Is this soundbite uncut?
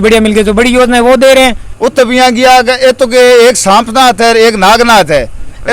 no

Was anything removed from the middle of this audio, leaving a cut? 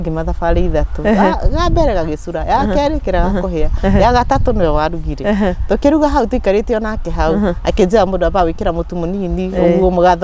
no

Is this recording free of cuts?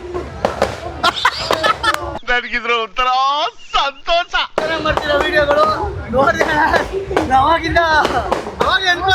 no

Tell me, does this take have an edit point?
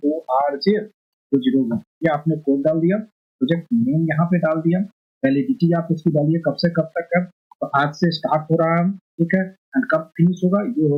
no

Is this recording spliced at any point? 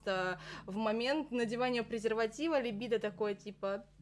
no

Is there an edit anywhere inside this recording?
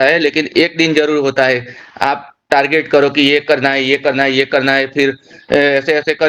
no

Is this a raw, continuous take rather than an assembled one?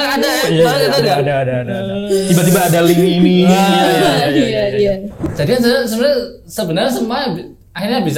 no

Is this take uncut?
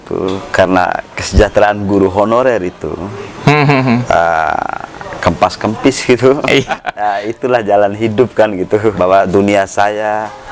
no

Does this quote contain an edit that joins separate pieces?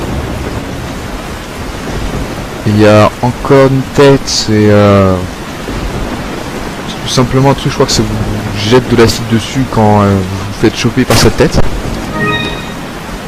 yes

